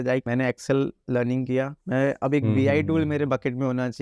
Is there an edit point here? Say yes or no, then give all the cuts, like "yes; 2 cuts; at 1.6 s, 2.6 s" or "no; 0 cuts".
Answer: no; 0 cuts